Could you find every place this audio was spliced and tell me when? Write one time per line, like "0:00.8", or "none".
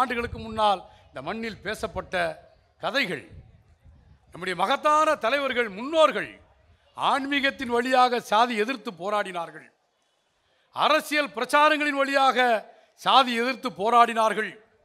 none